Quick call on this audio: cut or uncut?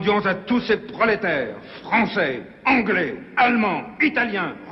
uncut